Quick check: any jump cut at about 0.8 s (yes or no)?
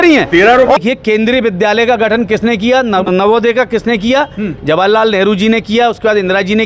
yes